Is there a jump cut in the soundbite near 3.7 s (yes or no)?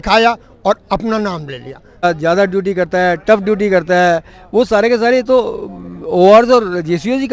no